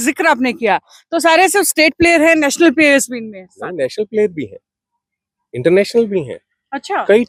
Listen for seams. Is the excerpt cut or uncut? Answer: uncut